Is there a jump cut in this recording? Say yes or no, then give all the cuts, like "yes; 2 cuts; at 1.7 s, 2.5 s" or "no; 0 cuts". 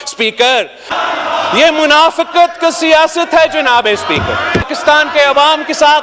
yes; 2 cuts; at 0.9 s, 4.7 s